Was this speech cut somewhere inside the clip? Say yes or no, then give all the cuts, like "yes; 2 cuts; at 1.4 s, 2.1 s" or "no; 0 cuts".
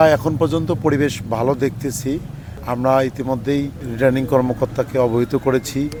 no; 0 cuts